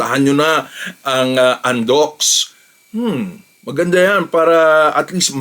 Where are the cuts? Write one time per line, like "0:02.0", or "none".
0:02.4